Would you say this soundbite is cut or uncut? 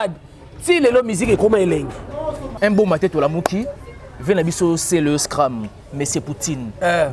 cut